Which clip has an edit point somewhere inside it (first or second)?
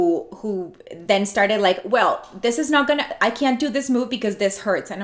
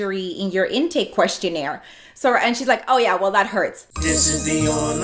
second